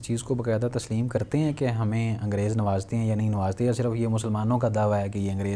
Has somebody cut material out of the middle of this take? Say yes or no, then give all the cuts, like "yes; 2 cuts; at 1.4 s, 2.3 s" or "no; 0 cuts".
no; 0 cuts